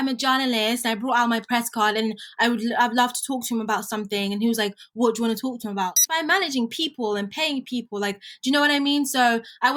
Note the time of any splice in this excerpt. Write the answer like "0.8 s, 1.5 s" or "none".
6.1 s